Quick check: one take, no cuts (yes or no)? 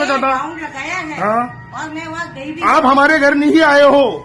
yes